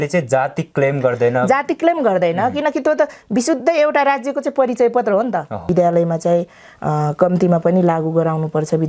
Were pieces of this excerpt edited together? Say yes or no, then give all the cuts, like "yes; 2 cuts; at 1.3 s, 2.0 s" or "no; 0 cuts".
yes; 1 cut; at 5.7 s